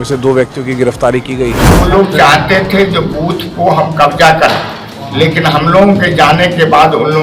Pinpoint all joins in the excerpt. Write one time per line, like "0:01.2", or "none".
0:01.6